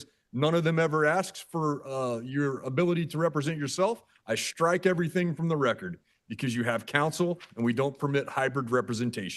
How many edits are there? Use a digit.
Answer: 0